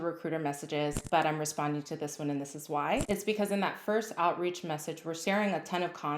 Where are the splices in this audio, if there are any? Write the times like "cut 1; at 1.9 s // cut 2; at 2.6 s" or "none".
cut 1; at 3.0 s // cut 2; at 5.1 s